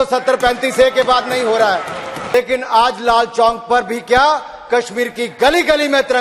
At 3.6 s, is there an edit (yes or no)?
no